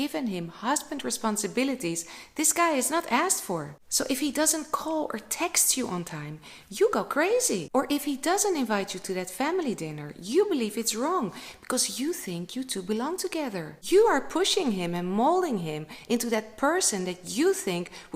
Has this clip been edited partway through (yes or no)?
no